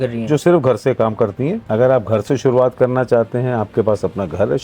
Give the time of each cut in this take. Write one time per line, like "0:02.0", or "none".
0:01.6